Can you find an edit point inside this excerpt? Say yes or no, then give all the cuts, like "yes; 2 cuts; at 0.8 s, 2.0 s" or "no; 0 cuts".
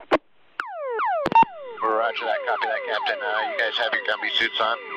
no; 0 cuts